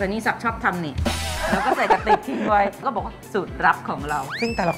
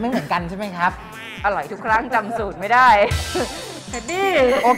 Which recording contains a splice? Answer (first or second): first